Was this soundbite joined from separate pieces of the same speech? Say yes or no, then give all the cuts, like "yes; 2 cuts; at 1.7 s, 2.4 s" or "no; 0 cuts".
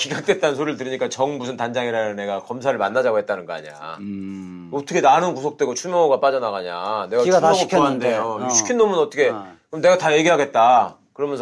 no; 0 cuts